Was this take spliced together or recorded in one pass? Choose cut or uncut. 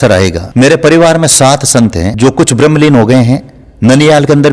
uncut